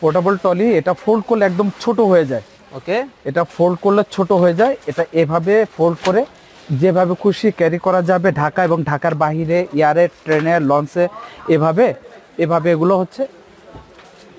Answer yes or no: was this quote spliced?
no